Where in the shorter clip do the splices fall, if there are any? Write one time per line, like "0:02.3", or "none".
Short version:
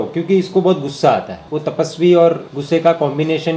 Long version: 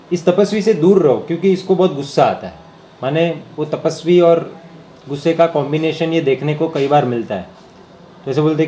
0:01.4
0:02.5